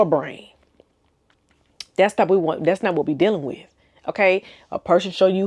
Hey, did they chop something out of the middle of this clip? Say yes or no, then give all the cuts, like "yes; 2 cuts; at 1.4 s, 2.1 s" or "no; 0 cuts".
no; 0 cuts